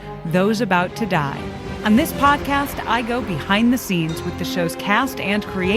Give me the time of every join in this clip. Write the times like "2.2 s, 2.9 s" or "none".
1.7 s